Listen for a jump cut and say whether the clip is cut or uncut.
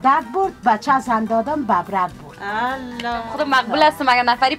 cut